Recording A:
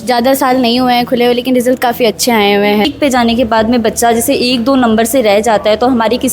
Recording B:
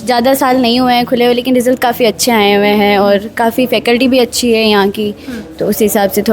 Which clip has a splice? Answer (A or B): A